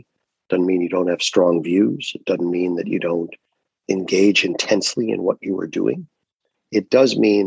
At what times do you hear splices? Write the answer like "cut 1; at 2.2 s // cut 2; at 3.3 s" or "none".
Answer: cut 1; at 3.7 s